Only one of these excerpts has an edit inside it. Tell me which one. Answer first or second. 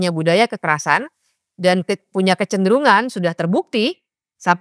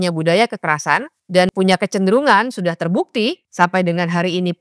second